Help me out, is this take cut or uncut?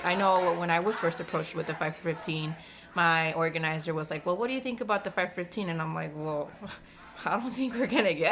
uncut